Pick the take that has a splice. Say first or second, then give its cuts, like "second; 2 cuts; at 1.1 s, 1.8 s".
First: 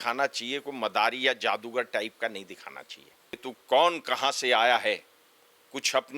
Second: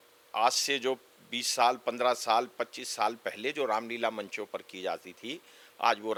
first; 1 cut; at 3.4 s